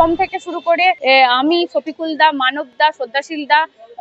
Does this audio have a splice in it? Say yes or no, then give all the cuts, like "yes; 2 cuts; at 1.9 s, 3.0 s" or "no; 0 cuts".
yes; 1 cut; at 1.0 s